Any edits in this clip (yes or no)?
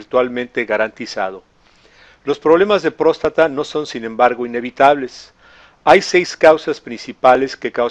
no